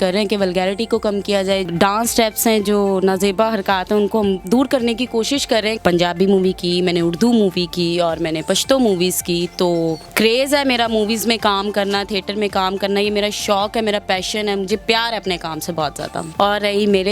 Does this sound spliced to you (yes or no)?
yes